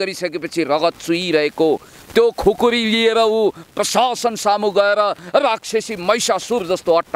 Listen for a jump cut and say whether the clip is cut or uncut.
uncut